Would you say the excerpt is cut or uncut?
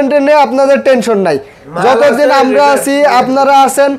uncut